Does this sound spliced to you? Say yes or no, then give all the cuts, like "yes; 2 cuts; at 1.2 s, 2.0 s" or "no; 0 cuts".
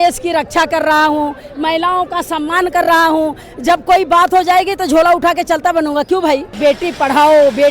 yes; 1 cut; at 6.5 s